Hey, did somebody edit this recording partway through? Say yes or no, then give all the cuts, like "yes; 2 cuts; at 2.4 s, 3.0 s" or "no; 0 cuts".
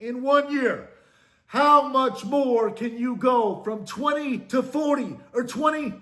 no; 0 cuts